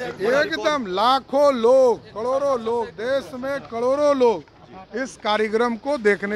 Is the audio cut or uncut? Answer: uncut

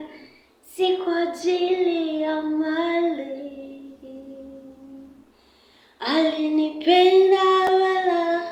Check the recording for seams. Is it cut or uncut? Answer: uncut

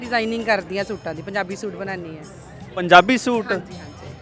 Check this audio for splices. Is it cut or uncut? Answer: uncut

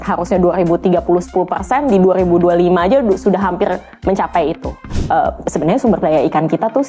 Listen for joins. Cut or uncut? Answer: cut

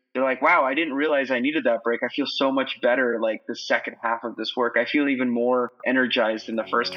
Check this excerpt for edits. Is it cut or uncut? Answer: uncut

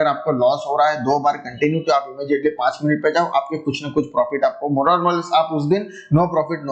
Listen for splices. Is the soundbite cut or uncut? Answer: uncut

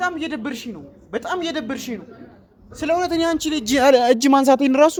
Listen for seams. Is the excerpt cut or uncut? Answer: uncut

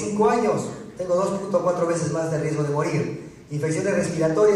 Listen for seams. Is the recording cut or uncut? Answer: cut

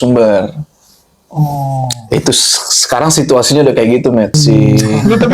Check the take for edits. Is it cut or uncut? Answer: cut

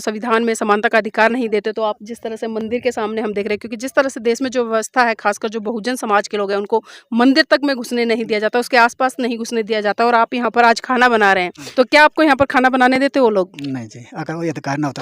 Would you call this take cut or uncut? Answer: cut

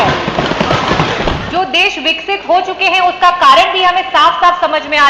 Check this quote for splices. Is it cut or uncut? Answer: cut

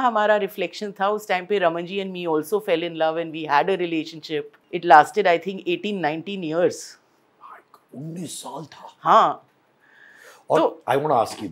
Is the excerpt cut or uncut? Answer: cut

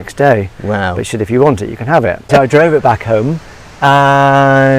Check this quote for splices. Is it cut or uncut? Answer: cut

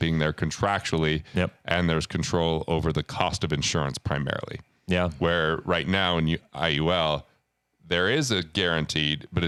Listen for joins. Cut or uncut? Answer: uncut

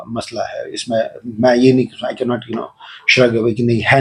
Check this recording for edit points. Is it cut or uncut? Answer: uncut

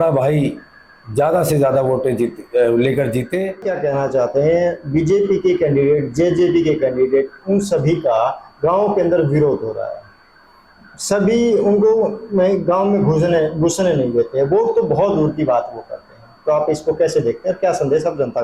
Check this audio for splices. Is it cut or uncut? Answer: cut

